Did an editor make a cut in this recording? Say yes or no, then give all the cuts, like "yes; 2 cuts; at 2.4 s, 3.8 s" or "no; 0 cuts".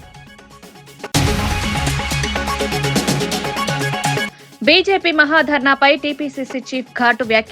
yes; 2 cuts; at 1.0 s, 4.1 s